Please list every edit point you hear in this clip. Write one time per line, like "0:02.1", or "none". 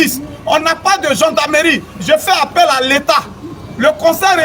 none